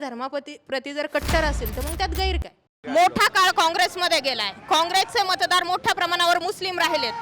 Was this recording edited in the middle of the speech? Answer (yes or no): yes